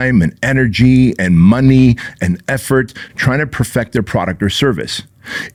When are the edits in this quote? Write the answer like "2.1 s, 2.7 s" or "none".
none